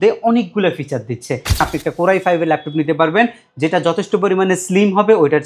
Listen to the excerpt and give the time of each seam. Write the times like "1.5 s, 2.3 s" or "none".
1.6 s